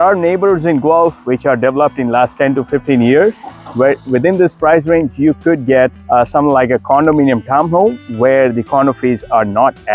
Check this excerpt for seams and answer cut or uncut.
uncut